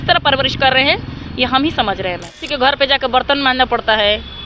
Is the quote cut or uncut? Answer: cut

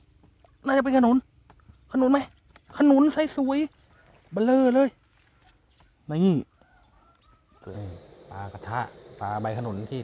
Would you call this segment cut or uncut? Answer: cut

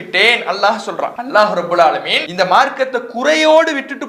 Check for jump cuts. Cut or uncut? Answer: cut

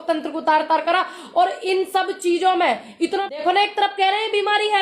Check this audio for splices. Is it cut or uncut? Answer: cut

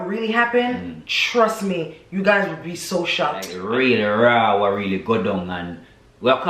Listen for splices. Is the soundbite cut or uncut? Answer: cut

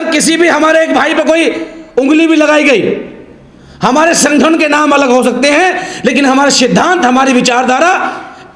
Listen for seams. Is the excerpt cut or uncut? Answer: uncut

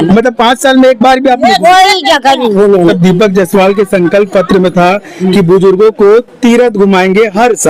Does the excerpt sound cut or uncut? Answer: cut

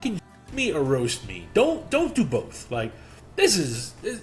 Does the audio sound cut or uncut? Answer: uncut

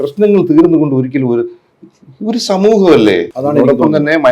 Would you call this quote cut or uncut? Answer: cut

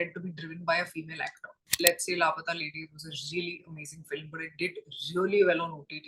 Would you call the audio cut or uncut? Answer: cut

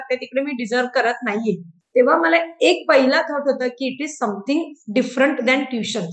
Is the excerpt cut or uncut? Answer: cut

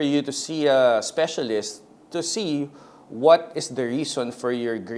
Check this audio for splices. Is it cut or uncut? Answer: uncut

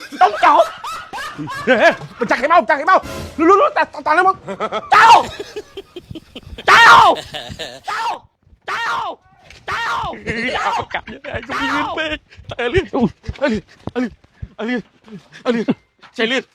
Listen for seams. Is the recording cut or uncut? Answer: cut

